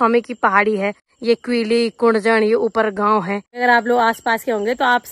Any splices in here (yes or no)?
yes